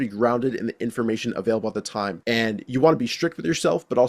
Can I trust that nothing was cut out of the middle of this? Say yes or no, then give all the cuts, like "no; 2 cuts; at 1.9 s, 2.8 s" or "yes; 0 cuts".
no; 1 cut; at 2.2 s